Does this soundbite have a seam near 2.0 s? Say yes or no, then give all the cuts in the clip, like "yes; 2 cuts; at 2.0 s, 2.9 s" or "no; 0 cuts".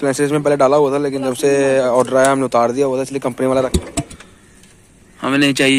no; 1 cut; at 3.7 s